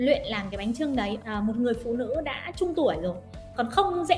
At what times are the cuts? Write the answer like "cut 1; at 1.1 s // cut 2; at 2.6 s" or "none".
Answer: cut 1; at 1.2 s